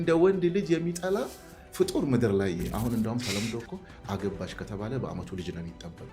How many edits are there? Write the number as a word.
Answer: one